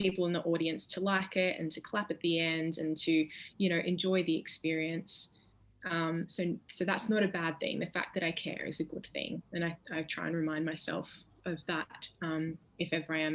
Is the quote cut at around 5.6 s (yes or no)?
no